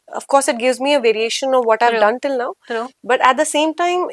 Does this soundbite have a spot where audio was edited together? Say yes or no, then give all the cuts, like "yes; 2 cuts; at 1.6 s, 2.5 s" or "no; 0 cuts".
no; 0 cuts